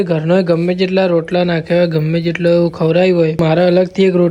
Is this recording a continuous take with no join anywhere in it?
no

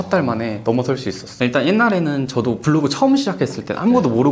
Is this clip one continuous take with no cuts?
no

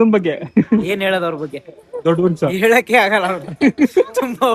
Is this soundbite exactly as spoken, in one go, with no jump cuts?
yes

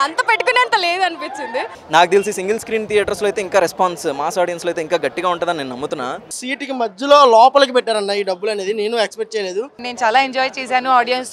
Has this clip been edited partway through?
yes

